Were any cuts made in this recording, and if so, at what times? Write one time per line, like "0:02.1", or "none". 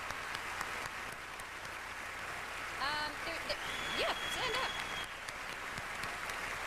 0:00.9